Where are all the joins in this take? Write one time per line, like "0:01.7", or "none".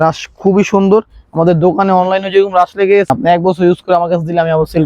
0:03.1